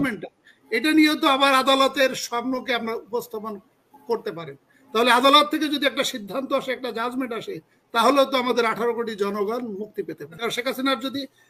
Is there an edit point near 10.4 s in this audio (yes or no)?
yes